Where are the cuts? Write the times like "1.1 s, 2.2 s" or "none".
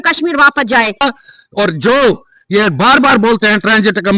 1.0 s